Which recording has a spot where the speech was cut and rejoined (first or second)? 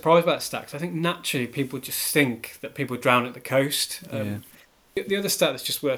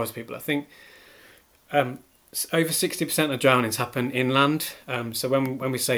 first